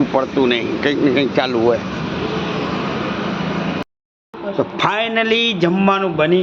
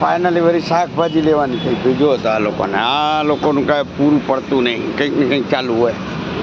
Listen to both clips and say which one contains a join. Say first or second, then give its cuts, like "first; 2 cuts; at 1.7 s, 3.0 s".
first; 1 cut; at 3.8 s